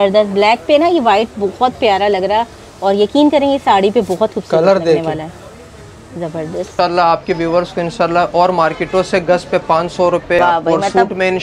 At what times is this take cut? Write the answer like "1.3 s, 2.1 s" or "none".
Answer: 6.7 s, 10.4 s